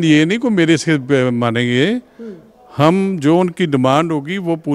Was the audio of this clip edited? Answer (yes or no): no